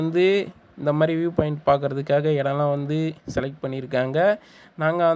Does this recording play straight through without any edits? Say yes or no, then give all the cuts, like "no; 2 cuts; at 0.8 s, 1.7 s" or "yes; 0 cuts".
yes; 0 cuts